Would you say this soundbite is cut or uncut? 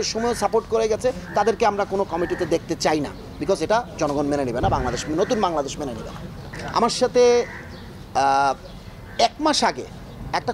uncut